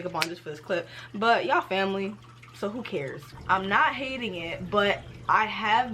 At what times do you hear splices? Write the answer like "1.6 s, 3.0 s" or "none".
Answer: 3.2 s